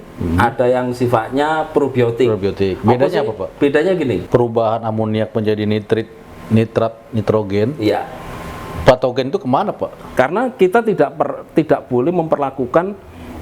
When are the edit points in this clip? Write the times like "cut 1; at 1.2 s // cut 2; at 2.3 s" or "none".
cut 1; at 4.2 s // cut 2; at 10.0 s